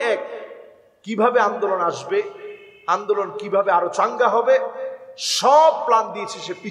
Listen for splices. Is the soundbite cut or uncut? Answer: uncut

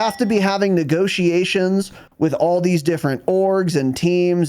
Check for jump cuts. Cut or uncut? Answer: uncut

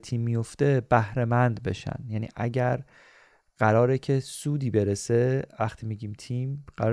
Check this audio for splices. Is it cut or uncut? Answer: uncut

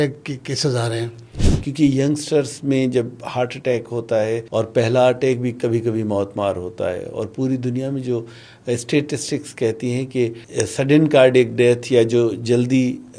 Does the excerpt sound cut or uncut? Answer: cut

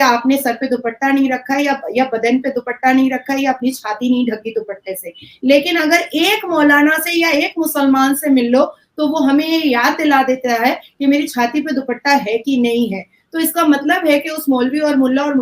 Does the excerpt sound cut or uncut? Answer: uncut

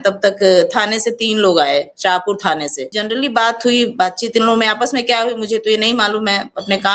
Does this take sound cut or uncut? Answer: cut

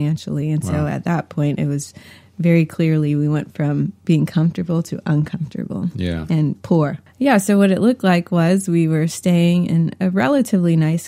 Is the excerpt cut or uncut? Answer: cut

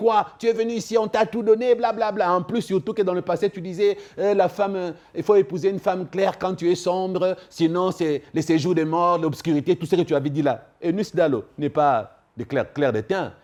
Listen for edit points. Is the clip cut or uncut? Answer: uncut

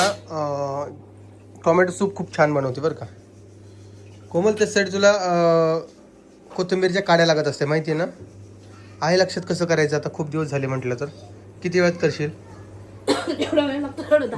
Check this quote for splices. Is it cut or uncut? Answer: uncut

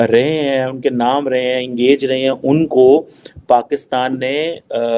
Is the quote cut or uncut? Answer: uncut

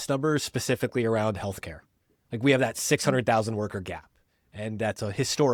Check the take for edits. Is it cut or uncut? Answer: uncut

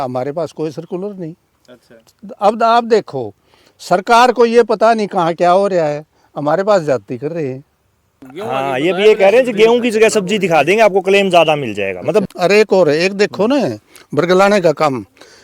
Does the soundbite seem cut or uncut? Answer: cut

